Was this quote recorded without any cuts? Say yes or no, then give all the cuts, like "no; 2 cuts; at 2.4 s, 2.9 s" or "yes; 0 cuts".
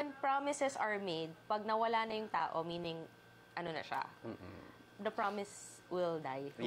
yes; 0 cuts